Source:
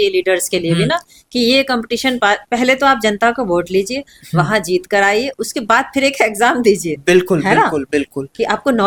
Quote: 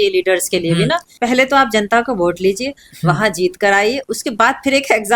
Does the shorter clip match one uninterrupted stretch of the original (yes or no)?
no